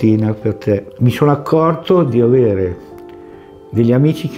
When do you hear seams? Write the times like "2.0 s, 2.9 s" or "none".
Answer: 0.9 s